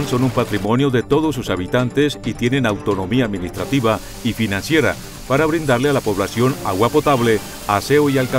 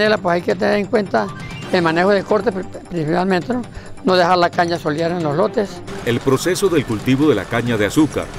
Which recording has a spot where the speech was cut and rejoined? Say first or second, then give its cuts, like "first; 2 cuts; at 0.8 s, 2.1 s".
second; 1 cut; at 5.9 s